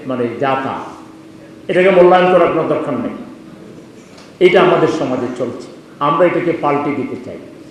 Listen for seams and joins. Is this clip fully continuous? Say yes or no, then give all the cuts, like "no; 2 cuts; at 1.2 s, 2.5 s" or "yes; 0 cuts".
yes; 0 cuts